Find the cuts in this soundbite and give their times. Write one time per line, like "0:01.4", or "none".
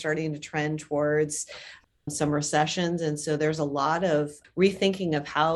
0:04.4

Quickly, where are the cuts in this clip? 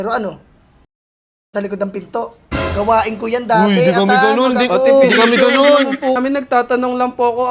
0:06.2

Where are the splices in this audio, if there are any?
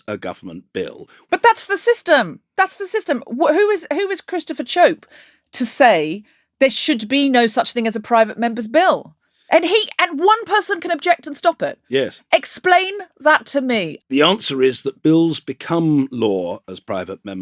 0:01.2
0:13.9

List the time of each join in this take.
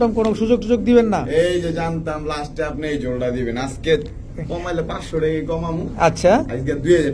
none

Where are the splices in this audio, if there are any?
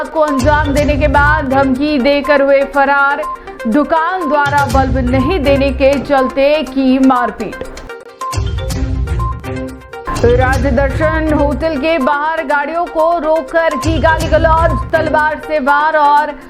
none

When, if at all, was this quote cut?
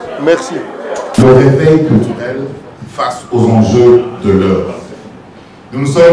0:01.2

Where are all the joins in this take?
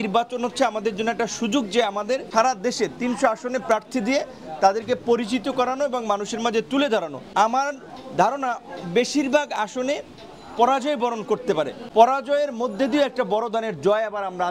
0:02.3
0:07.2
0:11.8

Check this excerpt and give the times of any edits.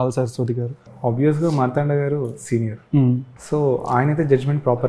0:00.9
0:03.3

